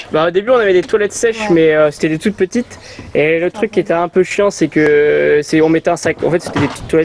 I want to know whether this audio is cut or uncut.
uncut